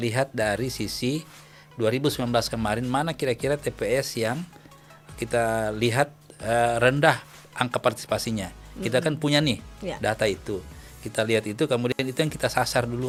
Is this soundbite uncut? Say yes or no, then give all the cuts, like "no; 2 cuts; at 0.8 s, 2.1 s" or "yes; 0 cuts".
yes; 0 cuts